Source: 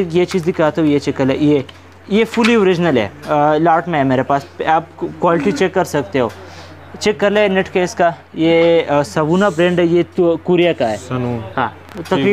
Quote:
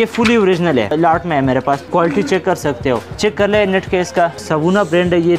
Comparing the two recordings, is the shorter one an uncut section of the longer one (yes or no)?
no